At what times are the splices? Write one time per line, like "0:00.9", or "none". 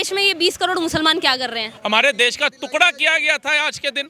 0:01.7